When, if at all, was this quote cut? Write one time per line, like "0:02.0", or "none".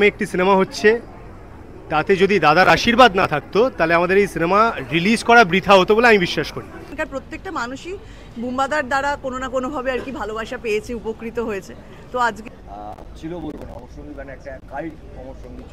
0:07.0
0:12.4

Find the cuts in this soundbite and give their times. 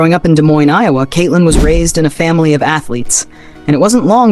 none

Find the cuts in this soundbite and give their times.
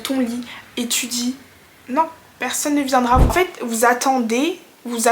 0:03.3

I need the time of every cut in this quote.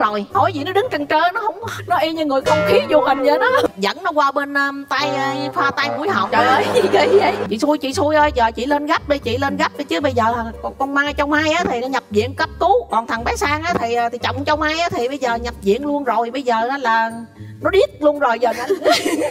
0:03.7
0:07.5

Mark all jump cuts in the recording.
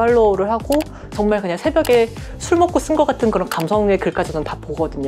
0:01.1

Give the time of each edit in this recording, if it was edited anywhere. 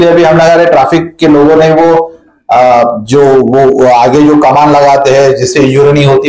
none

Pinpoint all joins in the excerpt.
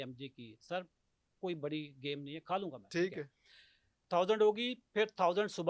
0:04.0

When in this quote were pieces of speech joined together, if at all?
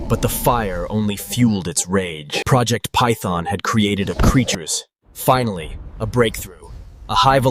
0:02.4

